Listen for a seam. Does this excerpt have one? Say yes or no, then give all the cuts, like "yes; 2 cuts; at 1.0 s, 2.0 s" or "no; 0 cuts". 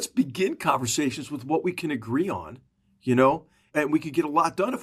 yes; 1 cut; at 3.7 s